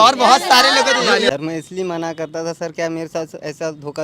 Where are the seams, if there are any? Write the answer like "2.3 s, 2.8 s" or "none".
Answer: 1.3 s